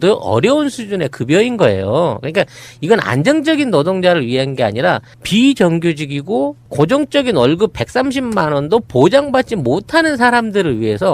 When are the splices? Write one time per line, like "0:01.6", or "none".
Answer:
none